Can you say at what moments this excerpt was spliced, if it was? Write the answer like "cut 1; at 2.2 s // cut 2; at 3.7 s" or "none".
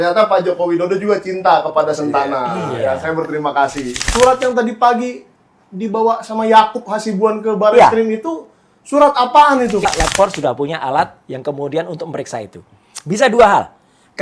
cut 1; at 4.0 s // cut 2; at 9.8 s